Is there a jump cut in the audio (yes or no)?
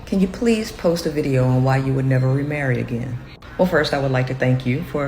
yes